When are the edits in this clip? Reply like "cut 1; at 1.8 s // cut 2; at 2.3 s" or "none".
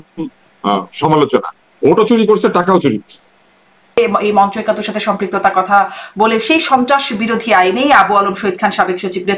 cut 1; at 4.0 s

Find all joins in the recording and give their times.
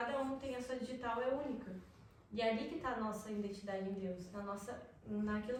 none

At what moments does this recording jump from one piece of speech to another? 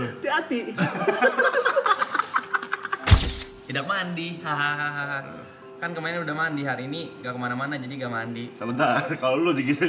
cut 1; at 3.2 s

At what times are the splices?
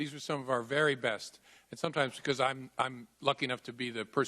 cut 1; at 1.6 s

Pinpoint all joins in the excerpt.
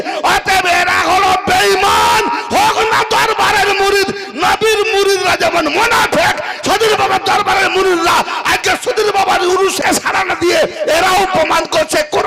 cut 1; at 9.8 s

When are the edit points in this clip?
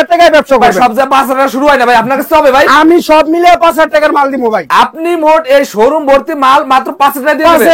none

